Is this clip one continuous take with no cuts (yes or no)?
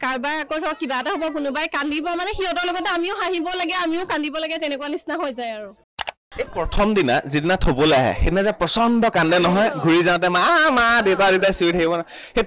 no